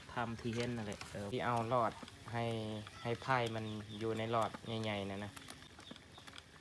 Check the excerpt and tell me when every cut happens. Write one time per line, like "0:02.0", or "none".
0:01.3
0:05.7